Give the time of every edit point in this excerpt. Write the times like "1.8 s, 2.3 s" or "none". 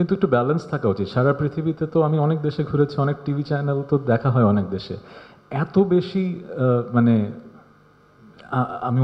none